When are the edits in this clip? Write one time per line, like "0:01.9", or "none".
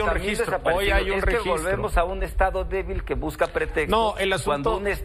none

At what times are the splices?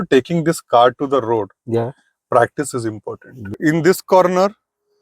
0:03.5

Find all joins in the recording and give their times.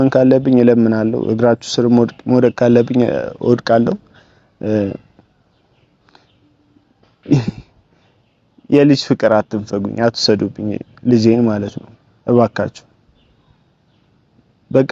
none

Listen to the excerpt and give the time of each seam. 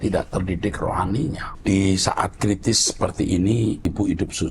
0:01.5
0:03.9

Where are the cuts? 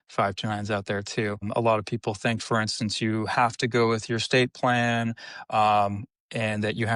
0:01.5

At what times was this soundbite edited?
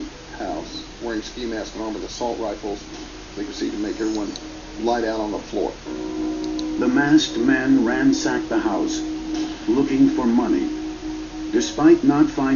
0:01.7

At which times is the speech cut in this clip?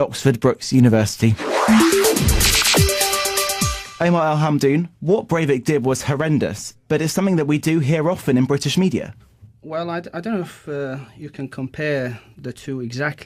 0:01.4
0:03.8

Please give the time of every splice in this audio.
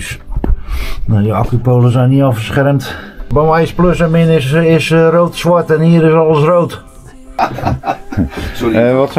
0:03.3
0:07.4

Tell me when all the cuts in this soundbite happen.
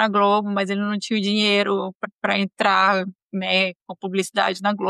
0:02.0

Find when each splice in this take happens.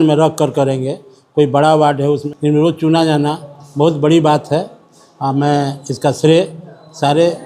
0:02.3

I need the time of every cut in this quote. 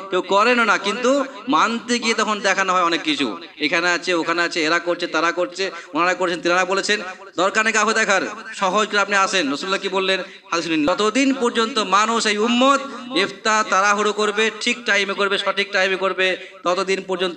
0:10.9

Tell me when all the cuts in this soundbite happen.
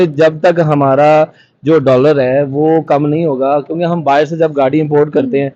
none

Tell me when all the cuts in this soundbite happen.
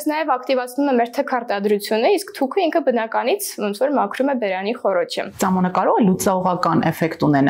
0:05.3

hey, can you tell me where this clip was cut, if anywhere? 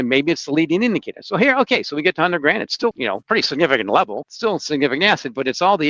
0:03.1
0:04.2

